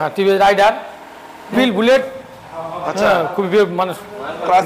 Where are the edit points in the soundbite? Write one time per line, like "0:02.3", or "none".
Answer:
0:01.5